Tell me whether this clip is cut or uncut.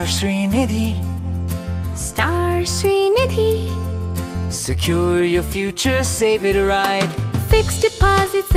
uncut